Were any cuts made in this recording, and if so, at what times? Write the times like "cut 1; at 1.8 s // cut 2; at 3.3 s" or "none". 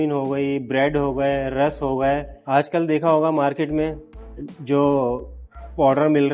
cut 1; at 2.4 s